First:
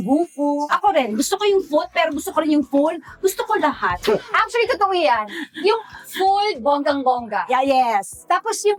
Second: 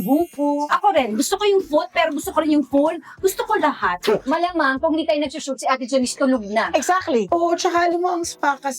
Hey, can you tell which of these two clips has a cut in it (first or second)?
second